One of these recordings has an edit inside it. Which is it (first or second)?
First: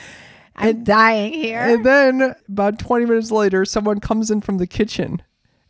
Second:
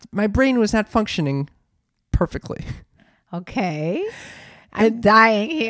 first